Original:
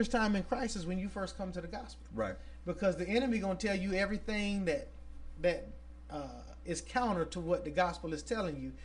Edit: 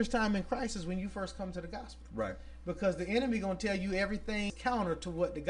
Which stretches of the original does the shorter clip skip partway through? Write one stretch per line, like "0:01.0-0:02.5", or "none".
0:04.5-0:06.8